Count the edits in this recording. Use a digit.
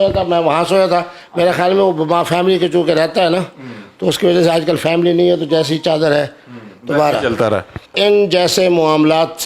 1